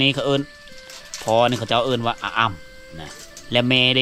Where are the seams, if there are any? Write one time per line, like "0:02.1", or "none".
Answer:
none